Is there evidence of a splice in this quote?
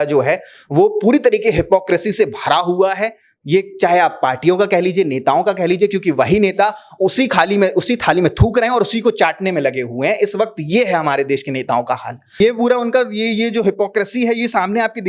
yes; 1 cut; at 12.3 s

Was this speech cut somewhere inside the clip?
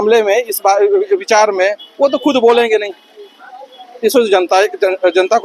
no; 0 cuts

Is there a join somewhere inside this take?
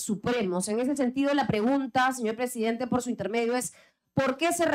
no; 0 cuts

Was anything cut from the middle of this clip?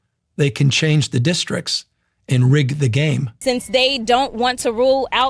yes; 1 cut; at 3.3 s

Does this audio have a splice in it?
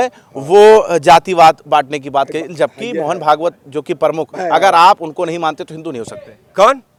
no; 0 cuts

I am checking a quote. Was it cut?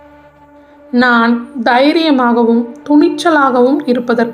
yes; 1 cut; at 0.9 s

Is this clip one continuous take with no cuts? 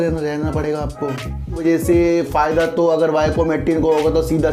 no; 1 cut; at 1.6 s

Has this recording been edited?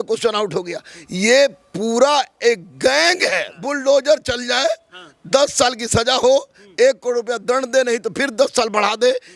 yes; 1 cut; at 3.6 s

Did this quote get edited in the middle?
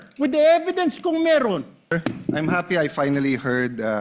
yes; 1 cut; at 1.9 s

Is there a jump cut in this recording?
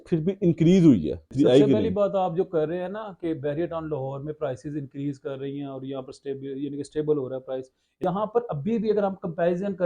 yes; 2 cuts; at 1.3 s, 7.9 s

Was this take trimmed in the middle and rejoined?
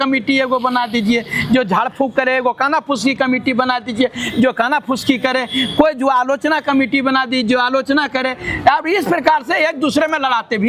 no; 0 cuts

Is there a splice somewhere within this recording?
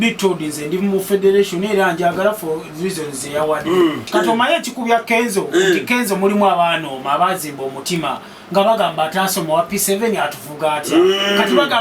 yes; 1 cut; at 4.0 s

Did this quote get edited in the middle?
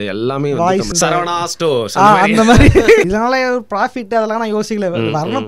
yes; 2 cuts; at 0.9 s, 3.1 s

